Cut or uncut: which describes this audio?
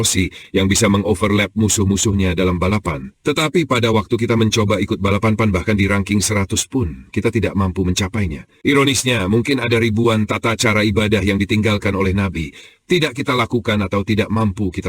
cut